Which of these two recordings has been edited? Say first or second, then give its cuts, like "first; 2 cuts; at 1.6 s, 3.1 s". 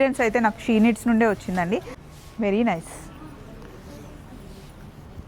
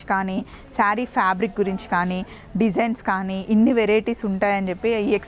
first; 1 cut; at 2.0 s